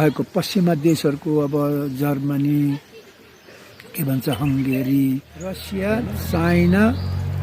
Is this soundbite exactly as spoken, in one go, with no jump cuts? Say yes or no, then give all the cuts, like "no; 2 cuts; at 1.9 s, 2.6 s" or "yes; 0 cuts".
no; 1 cut; at 5.7 s